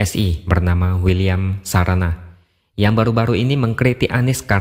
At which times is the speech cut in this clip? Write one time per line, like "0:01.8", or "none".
none

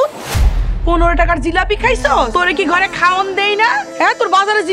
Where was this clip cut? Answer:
0:02.3
0:03.9

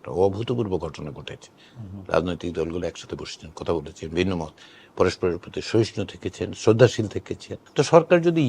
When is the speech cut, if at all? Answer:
0:07.5

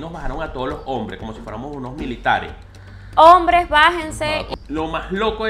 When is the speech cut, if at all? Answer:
0:04.5

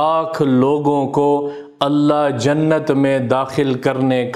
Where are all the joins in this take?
none

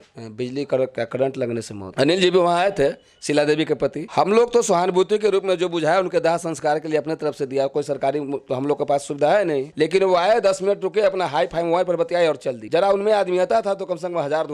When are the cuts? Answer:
0:01.9

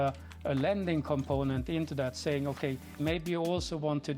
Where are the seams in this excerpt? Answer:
0:02.9

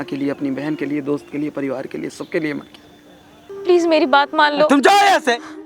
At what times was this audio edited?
0:03.5

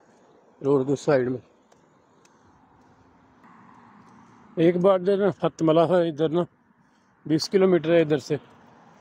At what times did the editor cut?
none

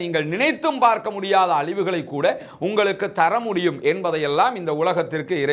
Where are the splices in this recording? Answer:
none

